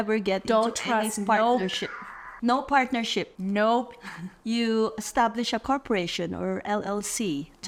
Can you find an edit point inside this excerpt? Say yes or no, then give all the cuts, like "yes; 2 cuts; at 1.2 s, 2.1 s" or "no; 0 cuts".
no; 0 cuts